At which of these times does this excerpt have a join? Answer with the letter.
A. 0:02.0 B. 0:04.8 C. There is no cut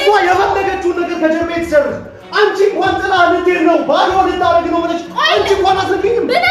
C